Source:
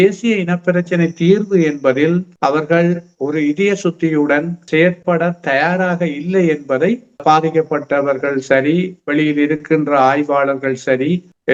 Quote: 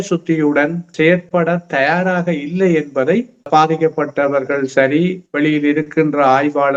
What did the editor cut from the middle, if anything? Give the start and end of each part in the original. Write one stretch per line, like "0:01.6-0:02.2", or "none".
none